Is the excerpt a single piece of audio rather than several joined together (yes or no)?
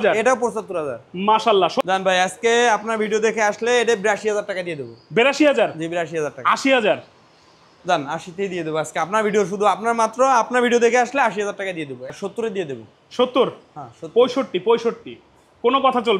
no